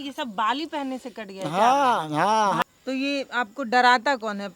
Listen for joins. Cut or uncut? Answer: cut